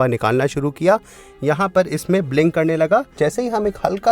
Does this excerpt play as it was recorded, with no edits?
no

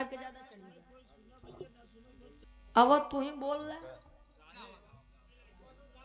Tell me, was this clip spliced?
yes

